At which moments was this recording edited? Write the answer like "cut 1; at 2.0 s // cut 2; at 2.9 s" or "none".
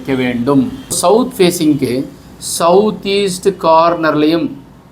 cut 1; at 1.0 s